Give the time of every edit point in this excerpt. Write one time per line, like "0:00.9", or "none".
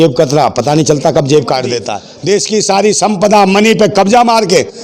0:01.8